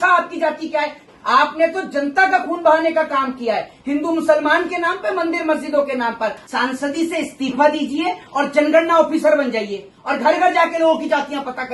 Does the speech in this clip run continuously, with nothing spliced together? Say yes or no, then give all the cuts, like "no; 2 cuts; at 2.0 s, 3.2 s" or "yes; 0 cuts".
no; 2 cuts; at 1.1 s, 6.4 s